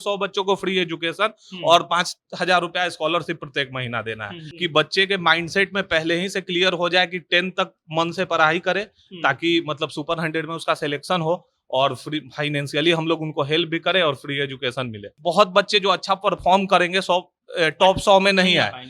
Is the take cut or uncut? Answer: cut